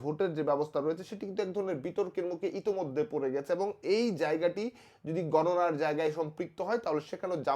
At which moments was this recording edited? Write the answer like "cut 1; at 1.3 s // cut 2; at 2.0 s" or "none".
none